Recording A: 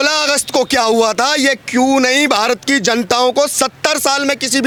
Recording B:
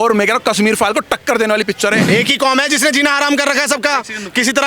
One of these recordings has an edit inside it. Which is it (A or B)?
B